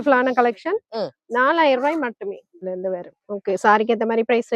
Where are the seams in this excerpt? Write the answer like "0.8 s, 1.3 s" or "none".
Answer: 2.6 s